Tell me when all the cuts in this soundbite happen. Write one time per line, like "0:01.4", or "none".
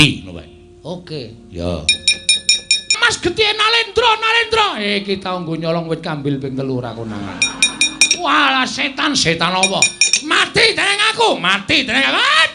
0:03.0